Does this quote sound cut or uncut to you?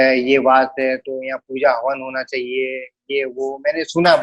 uncut